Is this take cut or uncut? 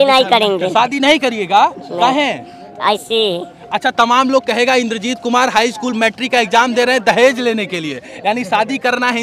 uncut